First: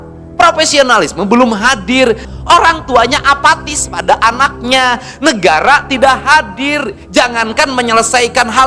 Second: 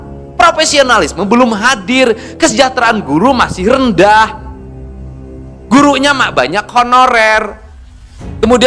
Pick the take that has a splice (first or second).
first